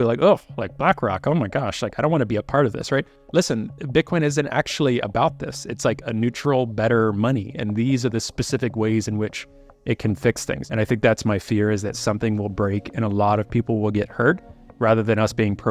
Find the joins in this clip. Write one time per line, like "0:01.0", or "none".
0:03.2
0:10.6